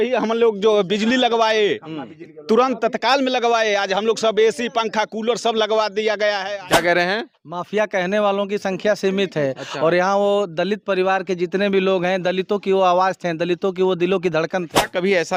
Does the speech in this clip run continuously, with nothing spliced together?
yes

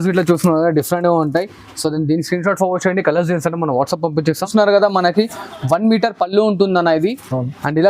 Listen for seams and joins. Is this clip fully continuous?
no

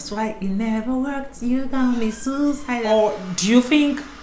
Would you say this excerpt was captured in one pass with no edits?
no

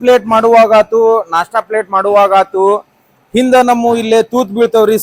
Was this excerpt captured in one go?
yes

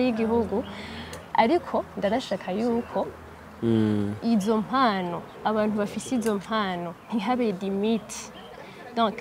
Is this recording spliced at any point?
no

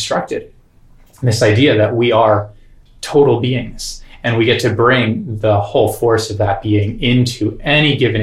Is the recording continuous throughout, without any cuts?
yes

